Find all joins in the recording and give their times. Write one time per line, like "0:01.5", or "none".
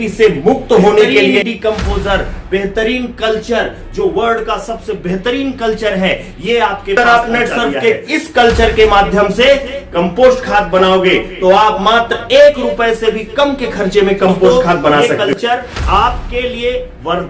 0:01.4
0:07.0
0:15.0